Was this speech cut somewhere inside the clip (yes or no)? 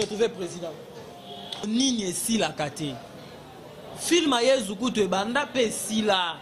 yes